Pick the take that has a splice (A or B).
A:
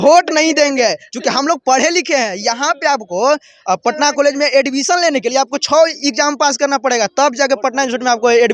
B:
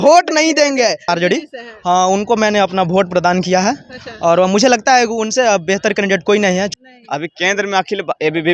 B